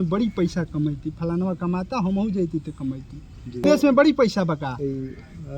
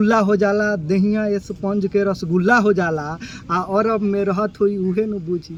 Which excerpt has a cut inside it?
first; 1 cut; at 3.7 s

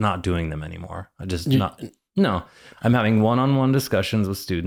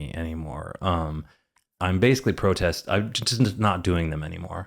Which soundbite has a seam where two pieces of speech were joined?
second; 1 cut; at 1.8 s

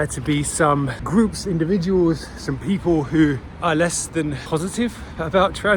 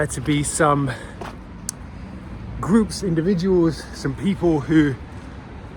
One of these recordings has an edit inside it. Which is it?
first; 3 cuts; at 1.0 s, 3.5 s, 4.4 s

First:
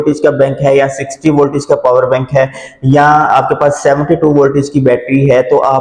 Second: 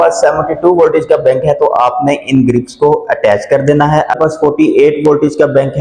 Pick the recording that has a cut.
second; 1 cut; at 4.2 s

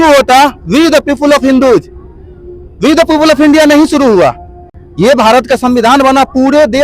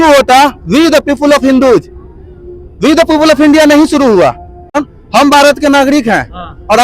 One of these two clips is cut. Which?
second; 1 cut; at 4.8 s

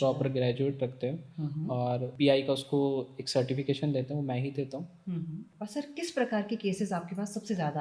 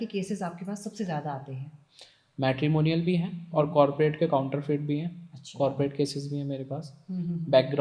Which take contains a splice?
first; 2 cuts; at 2.1 s, 5.4 s

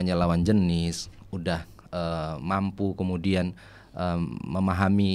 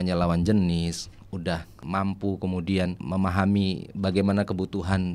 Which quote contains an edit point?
second; 2 cuts; at 1.8 s, 3.0 s

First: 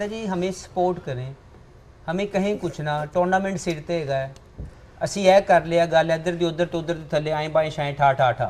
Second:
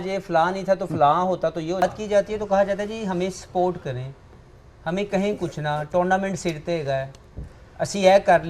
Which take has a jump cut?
second; 1 cut; at 1.8 s

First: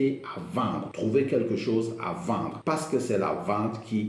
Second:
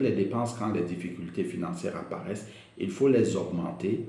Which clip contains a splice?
first; 2 cuts; at 0.9 s, 2.5 s

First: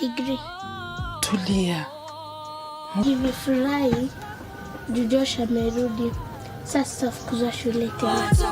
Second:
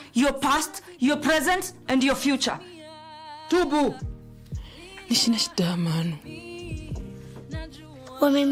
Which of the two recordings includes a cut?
first; 1 cut; at 3.0 s

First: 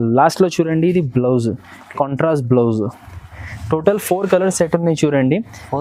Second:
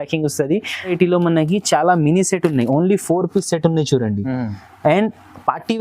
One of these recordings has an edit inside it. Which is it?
second; 1 cut; at 0.9 s

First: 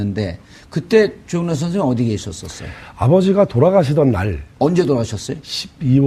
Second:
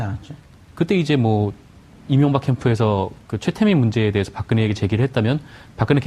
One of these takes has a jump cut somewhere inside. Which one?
second; 1 cut; at 4.6 s

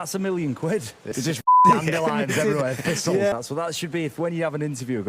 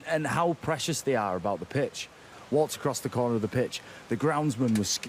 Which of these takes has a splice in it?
first; 1 cut; at 1.0 s

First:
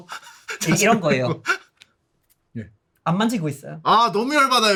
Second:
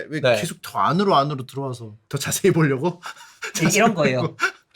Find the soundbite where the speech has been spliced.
second; 1 cut; at 2.0 s

